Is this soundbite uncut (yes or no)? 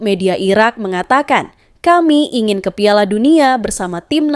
yes